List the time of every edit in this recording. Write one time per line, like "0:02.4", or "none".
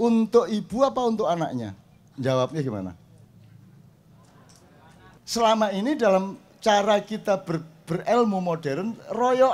0:05.2